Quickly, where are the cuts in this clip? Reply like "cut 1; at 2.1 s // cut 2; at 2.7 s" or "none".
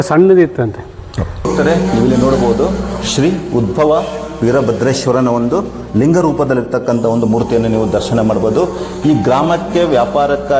cut 1; at 1.4 s